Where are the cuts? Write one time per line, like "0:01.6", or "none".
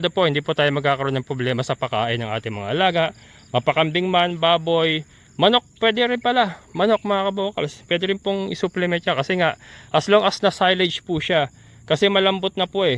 none